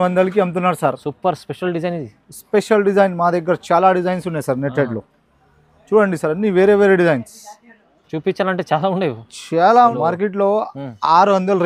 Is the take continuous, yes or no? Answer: no